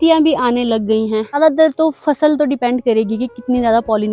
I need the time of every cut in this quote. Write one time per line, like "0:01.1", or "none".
0:01.4